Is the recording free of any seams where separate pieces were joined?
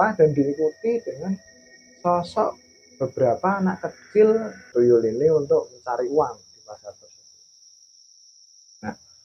no; 1 cut; at 4.6 s

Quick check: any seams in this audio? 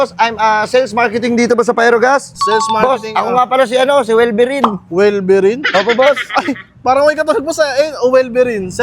no; 0 cuts

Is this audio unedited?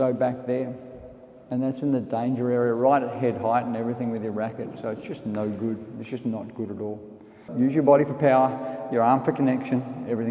no; 1 cut; at 7.4 s

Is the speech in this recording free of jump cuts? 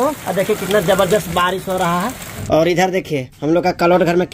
no; 1 cut; at 2.3 s

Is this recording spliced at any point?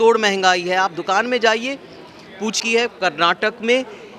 yes; 1 cut; at 2.6 s

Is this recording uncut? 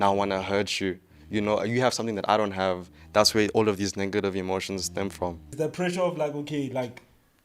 no; 1 cut; at 5.5 s

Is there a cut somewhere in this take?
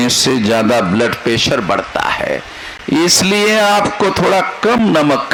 no; 0 cuts

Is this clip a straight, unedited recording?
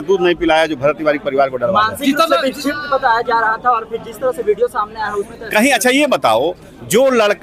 yes; 0 cuts

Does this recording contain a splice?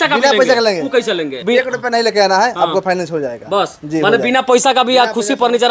yes; 1 cut; at 1.4 s

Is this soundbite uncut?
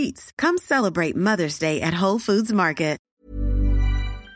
no; 1 cut; at 3.0 s

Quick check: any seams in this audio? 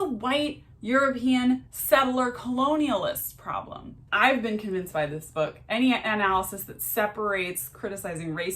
yes; 1 cut; at 4.1 s

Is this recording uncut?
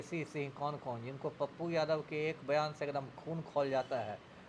yes; 0 cuts

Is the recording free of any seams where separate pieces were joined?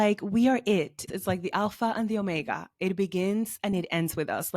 no; 1 cut; at 1.1 s

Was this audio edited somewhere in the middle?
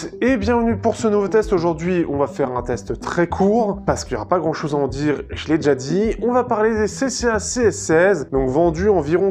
yes; 2 cuts; at 3.8 s, 8.3 s

